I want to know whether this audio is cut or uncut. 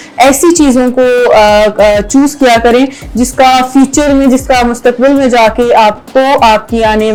uncut